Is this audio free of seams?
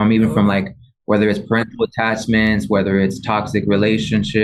yes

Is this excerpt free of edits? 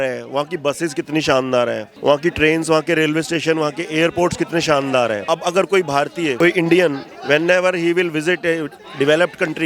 no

